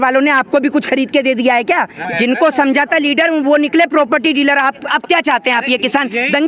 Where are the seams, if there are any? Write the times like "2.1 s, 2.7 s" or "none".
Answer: 2.0 s, 4.8 s